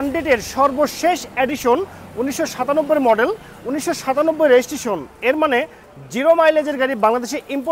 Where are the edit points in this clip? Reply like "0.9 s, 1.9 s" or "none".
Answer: none